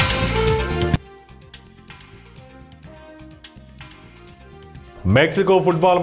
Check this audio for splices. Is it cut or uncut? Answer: cut